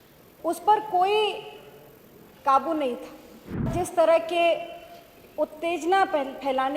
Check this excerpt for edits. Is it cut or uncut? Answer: cut